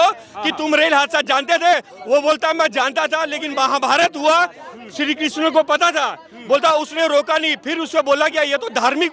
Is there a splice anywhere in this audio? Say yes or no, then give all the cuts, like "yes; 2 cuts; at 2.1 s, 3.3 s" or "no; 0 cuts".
no; 0 cuts